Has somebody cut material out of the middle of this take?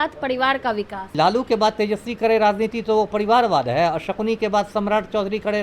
yes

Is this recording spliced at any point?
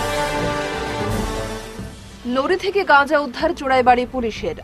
yes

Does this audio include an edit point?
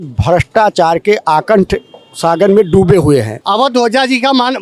yes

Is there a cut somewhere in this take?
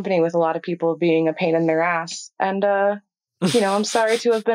no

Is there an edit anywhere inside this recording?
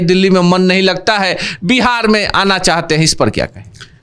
no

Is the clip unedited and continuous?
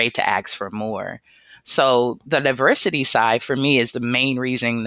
yes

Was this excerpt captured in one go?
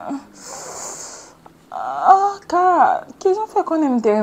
yes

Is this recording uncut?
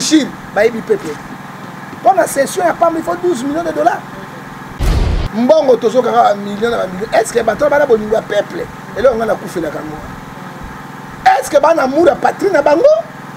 no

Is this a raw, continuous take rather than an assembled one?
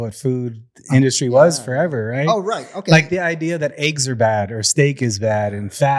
yes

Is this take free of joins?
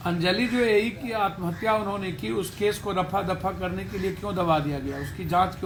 yes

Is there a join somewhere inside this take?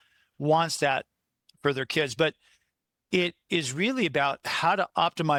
no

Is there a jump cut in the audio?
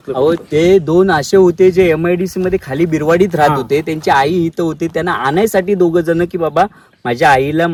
no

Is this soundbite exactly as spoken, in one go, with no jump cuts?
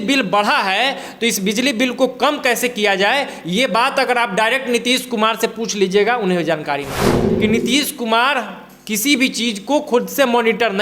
no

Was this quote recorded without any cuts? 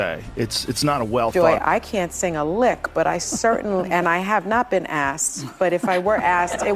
no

